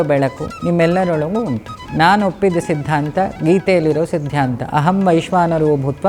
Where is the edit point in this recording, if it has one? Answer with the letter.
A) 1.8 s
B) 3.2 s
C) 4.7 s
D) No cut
A